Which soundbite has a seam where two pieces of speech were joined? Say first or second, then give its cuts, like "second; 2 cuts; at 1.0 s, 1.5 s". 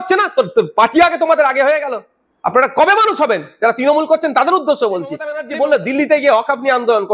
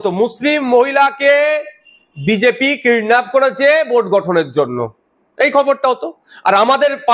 first; 1 cut; at 5.4 s